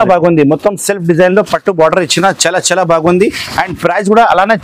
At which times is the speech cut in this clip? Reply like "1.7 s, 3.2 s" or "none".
none